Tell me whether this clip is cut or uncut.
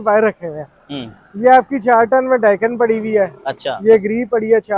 uncut